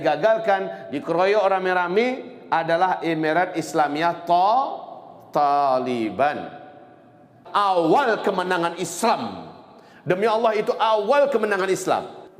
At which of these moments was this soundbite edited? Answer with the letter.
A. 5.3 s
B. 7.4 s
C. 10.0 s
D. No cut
B